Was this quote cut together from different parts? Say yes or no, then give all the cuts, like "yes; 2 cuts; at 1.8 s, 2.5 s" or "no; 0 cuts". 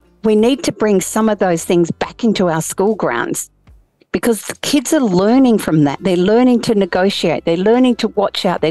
no; 0 cuts